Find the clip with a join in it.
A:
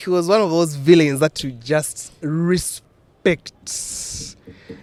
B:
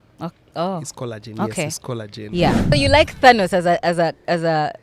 B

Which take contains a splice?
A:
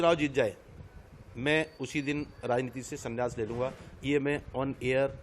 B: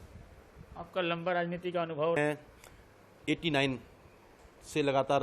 B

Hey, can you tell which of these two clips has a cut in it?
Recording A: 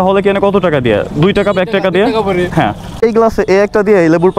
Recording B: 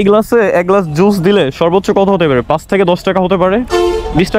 A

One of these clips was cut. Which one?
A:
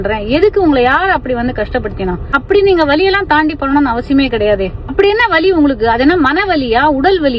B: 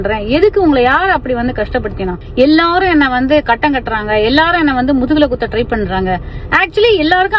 B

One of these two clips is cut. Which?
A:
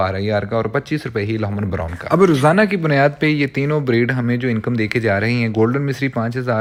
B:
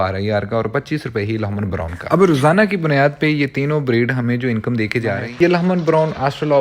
B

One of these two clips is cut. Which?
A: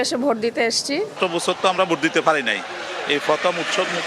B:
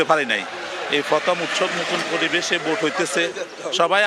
A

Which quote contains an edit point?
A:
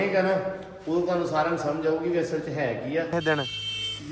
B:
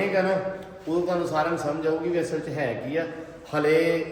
A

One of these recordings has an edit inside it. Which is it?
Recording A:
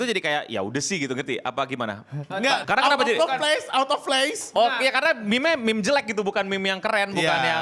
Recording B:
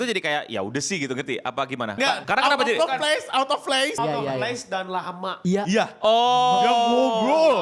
B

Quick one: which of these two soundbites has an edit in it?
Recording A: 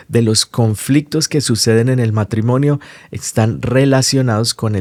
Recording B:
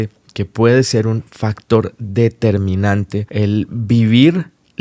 B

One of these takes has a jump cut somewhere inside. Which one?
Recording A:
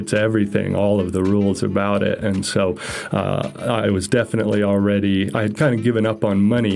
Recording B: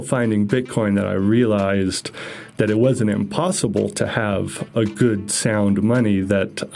B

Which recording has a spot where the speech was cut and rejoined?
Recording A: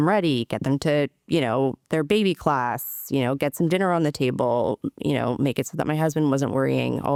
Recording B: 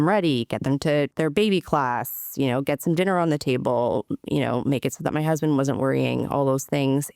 B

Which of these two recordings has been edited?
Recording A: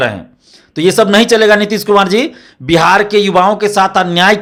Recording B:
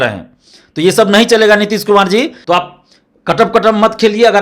B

